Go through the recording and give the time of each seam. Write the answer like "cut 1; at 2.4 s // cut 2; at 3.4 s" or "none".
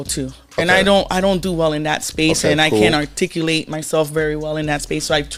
none